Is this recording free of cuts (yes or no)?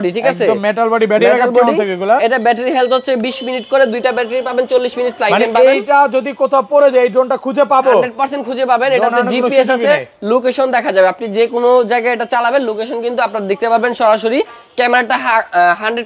yes